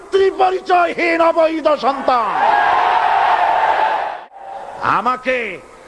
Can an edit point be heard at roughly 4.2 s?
yes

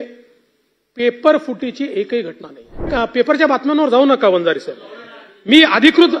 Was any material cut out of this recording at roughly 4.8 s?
no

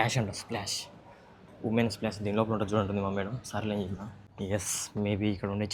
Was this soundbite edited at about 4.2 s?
no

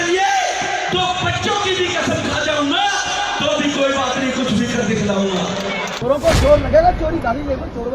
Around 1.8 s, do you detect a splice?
no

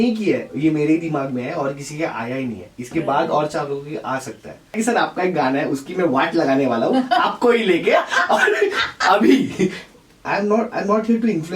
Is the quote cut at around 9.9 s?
yes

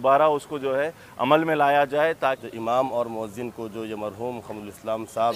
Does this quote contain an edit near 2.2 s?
yes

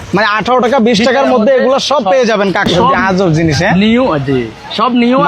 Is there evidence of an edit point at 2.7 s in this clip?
yes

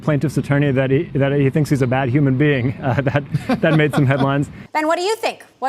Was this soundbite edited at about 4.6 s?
yes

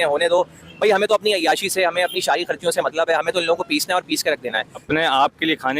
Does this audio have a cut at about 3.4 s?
no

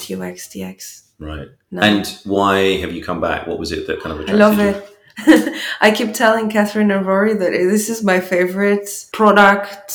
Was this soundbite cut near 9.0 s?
yes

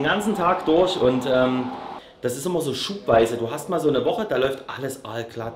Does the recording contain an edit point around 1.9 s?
yes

